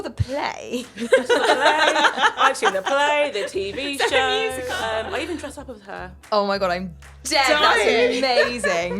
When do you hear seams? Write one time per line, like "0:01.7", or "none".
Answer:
0:04.7
0:06.1